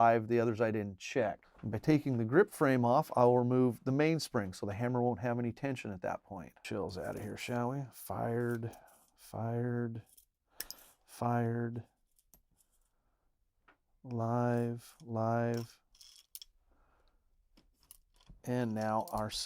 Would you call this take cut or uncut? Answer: cut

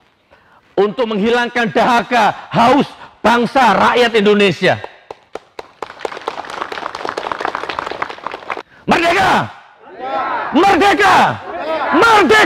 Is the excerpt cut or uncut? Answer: cut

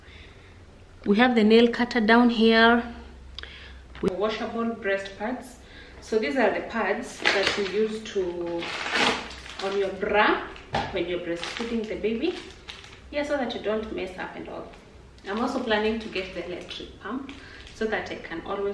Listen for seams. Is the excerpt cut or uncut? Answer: cut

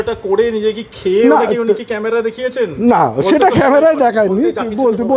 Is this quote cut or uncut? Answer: uncut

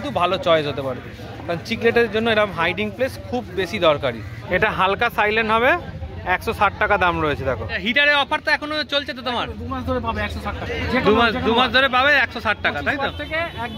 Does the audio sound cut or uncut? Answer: cut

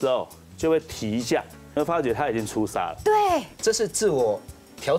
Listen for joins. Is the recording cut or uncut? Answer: cut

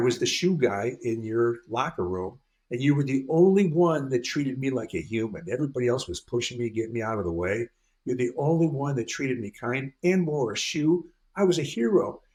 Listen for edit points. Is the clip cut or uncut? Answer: uncut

